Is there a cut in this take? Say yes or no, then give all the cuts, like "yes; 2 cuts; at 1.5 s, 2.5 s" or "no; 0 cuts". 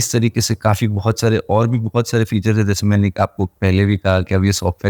no; 0 cuts